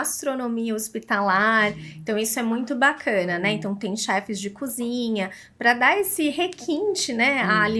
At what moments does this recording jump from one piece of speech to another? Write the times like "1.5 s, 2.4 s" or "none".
none